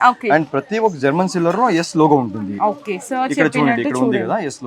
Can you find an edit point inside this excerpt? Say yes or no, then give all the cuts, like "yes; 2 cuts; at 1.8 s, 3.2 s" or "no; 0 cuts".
no; 0 cuts